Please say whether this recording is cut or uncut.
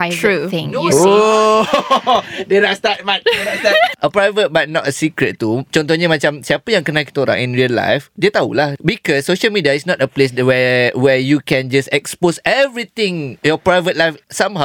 cut